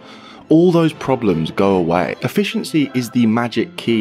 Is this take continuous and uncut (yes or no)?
no